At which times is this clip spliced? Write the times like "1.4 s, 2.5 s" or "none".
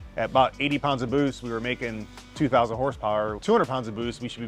none